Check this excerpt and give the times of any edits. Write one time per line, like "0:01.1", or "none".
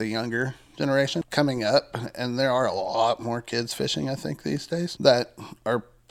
0:01.2
0:04.9

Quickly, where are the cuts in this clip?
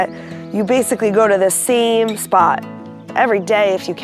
0:03.0

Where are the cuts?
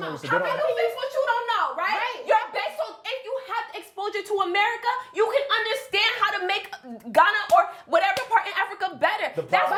none

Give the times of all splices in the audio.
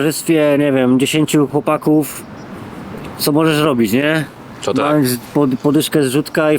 0:01.5

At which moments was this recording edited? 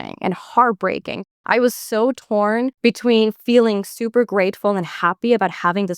0:01.3
0:02.7

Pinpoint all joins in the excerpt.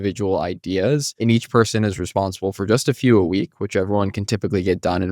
0:01.1

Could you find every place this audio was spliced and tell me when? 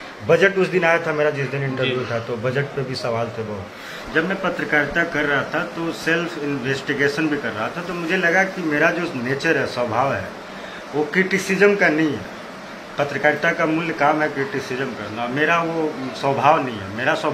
0:03.9

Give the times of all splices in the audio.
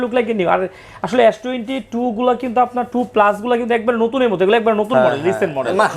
none

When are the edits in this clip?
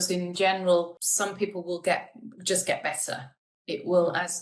0:01.0

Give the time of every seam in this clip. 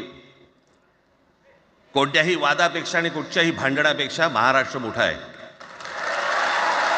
none

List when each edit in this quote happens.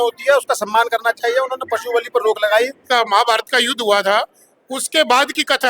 0:02.8

